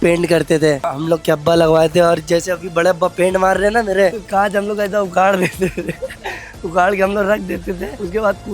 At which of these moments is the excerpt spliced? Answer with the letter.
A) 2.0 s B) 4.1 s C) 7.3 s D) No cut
B